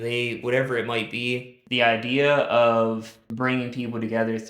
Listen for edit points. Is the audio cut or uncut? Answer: cut